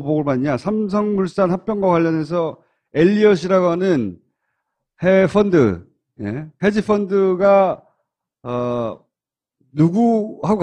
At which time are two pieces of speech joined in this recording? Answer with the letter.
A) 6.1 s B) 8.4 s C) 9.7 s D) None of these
B